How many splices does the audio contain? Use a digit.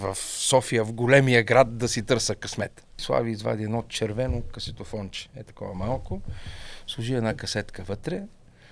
1